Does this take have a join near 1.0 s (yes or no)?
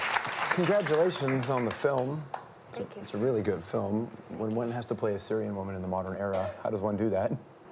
no